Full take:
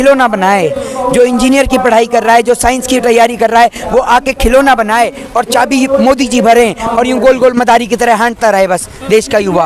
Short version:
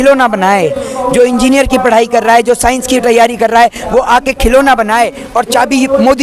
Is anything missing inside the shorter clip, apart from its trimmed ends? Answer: no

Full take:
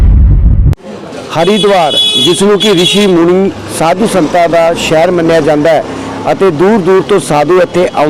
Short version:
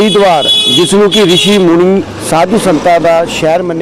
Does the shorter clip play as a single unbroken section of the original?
yes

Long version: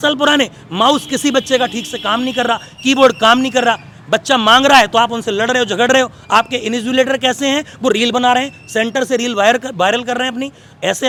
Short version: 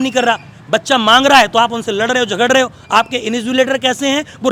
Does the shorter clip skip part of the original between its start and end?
no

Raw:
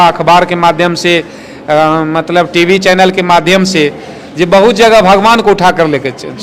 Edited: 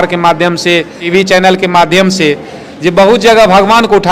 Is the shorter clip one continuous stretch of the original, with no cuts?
no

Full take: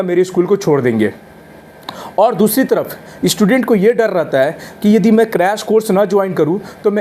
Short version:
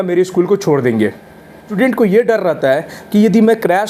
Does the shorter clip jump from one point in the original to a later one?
yes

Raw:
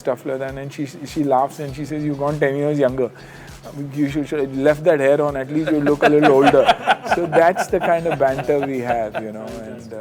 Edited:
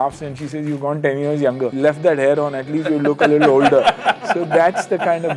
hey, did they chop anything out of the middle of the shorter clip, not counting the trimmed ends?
yes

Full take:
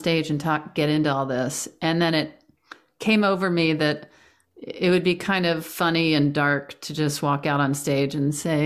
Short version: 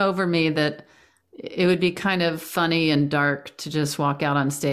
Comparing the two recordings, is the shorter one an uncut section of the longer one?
yes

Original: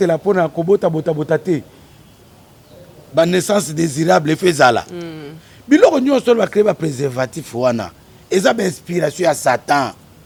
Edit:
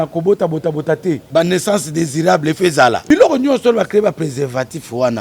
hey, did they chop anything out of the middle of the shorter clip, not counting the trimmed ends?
yes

